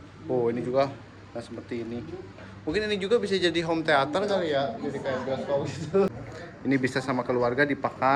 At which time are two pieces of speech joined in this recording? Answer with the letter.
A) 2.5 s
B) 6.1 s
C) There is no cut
B